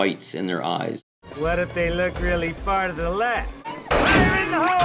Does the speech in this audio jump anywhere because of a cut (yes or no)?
yes